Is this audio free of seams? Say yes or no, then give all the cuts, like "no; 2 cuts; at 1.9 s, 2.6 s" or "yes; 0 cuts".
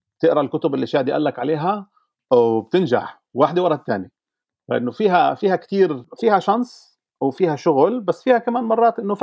no; 1 cut; at 6.1 s